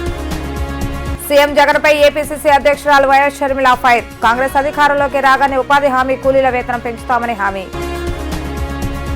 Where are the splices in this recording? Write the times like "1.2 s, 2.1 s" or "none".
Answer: none